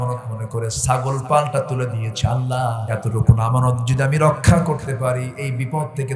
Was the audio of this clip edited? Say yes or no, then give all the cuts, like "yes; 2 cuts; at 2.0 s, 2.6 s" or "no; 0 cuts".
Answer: yes; 1 cut; at 2.8 s